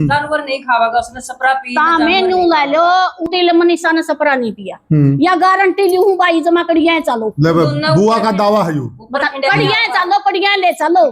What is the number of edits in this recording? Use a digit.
1